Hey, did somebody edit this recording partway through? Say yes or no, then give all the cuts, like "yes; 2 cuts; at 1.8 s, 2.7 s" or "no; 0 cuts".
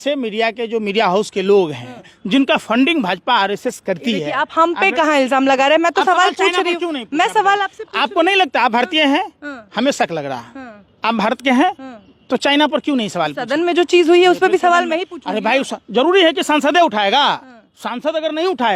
no; 0 cuts